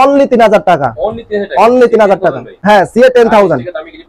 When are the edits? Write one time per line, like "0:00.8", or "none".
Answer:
none